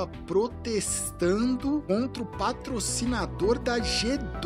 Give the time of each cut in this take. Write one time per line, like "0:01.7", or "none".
none

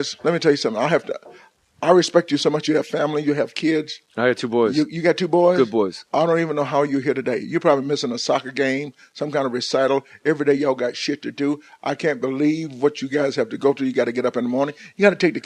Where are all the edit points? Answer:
0:09.5

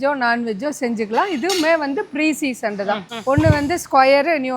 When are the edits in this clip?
0:03.1

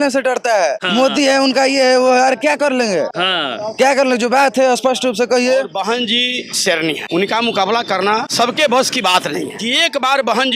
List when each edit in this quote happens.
0:00.8
0:03.1
0:05.7
0:07.0
0:08.3
0:09.6

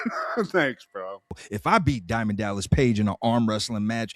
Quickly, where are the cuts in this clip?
0:01.5

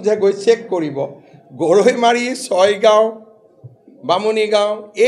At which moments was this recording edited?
none

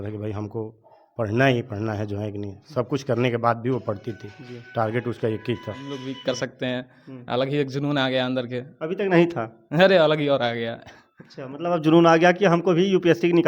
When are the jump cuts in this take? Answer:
0:06.0

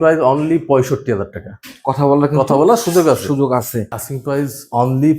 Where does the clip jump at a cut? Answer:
0:04.0

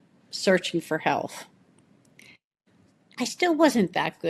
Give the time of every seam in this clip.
none

